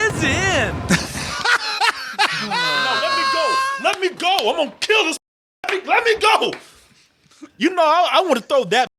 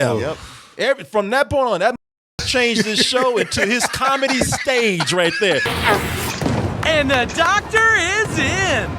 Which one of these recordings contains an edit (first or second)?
second